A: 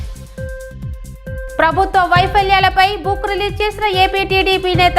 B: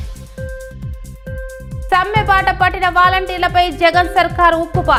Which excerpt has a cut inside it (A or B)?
A